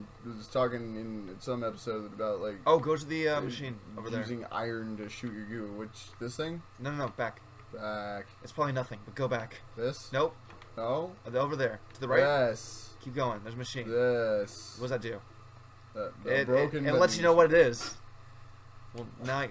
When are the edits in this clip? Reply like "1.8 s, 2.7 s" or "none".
13.4 s